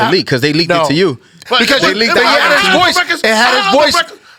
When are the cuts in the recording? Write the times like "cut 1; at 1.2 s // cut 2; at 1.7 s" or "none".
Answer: none